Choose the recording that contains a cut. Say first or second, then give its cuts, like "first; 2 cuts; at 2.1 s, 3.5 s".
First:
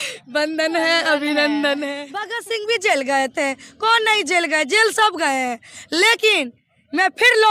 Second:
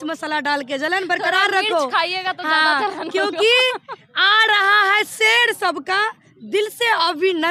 first; 1 cut; at 2.4 s